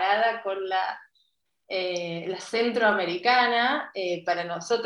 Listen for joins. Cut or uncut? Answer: uncut